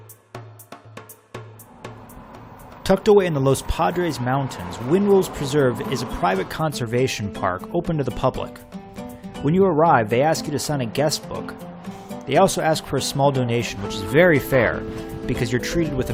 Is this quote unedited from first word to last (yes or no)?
no